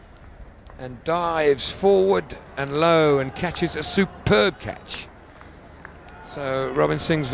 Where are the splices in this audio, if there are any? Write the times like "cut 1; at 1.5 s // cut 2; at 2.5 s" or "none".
cut 1; at 1.2 s